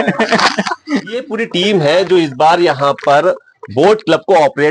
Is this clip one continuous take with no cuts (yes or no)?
no